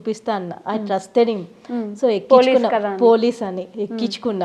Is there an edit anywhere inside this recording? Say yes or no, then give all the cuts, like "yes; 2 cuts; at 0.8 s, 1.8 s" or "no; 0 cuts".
no; 0 cuts